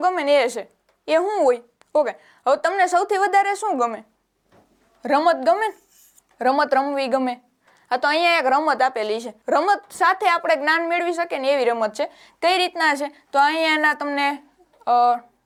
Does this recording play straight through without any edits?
yes; 0 cuts

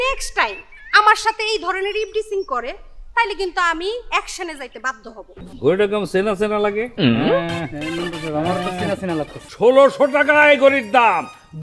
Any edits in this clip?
yes; 2 cuts; at 5.4 s, 9.4 s

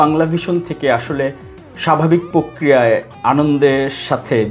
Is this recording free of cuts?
yes; 0 cuts

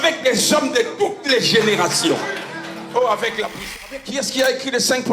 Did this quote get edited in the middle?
yes; 1 cut; at 3.5 s

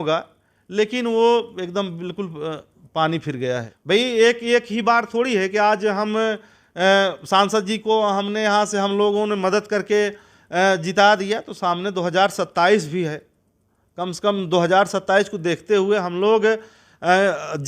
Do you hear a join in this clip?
yes; 1 cut; at 3.7 s

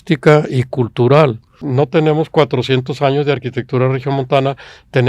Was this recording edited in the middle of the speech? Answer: yes; 1 cut; at 1.6 s

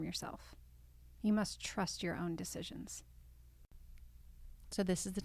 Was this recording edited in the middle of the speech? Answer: yes; 1 cut; at 3.9 s

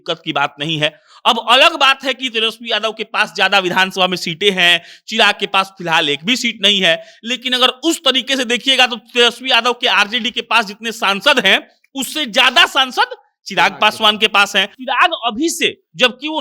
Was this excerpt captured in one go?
no; 1 cut; at 14.7 s

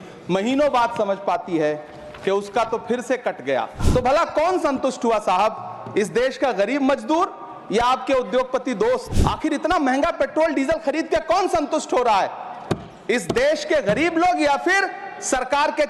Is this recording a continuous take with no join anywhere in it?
no; 2 cuts; at 3.8 s, 9.1 s

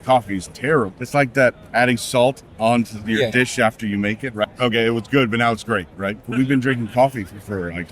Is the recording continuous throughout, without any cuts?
no; 3 cuts; at 1.0 s, 4.4 s, 6.3 s

